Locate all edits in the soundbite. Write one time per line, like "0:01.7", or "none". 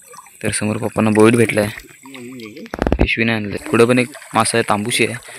0:03.6